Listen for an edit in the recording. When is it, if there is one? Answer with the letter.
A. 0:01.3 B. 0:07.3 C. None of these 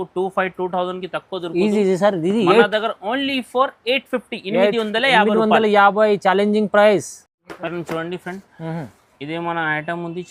C